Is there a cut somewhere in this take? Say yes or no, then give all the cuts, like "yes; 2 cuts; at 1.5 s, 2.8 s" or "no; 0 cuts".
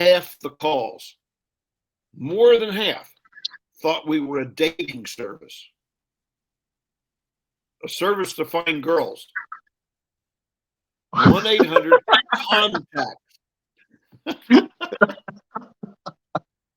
no; 0 cuts